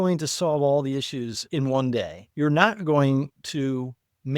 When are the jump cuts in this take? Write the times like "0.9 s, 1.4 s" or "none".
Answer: 1.4 s, 2.2 s